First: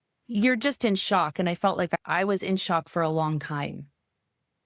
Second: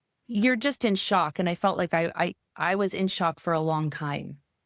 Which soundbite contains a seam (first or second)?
first